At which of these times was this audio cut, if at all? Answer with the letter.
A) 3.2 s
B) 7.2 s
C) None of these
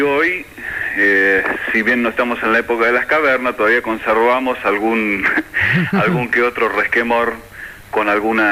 C